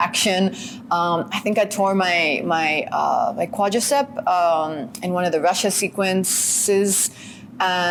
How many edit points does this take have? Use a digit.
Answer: 0